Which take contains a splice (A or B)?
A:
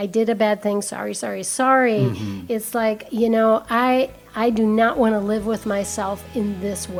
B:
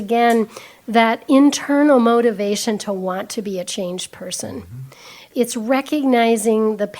B